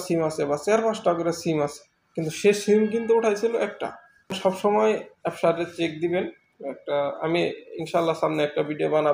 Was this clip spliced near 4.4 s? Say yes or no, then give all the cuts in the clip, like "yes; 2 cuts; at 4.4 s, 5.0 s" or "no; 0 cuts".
yes; 1 cut; at 4.4 s